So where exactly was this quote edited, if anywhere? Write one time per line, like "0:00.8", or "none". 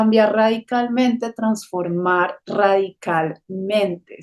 none